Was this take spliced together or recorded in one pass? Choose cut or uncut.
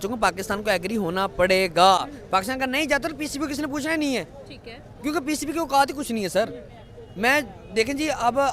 uncut